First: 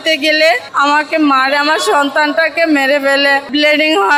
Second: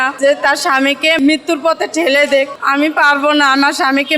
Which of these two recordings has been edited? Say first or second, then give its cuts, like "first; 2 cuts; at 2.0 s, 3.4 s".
second; 1 cut; at 1.2 s